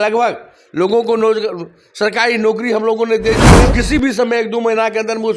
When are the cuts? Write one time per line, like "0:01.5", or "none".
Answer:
0:03.7